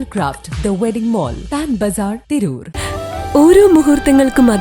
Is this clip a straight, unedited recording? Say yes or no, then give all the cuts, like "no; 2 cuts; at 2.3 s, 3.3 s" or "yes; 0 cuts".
no; 1 cut; at 2.7 s